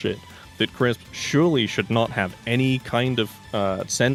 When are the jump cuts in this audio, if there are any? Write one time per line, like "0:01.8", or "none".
none